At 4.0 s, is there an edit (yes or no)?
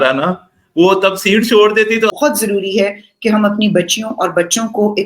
no